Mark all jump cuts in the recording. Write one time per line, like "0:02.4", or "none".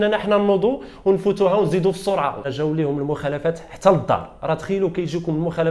0:02.5